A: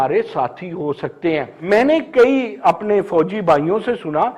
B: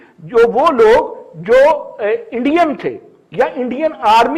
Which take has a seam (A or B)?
A